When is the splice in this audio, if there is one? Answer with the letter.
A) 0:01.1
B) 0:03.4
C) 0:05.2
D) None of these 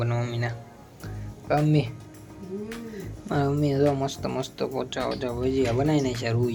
D